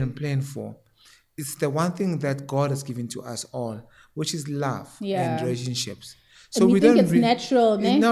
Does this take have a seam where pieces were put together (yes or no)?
no